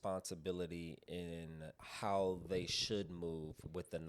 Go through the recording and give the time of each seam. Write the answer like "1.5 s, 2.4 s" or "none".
1.8 s